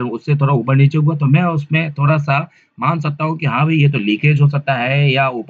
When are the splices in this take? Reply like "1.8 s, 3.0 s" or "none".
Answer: none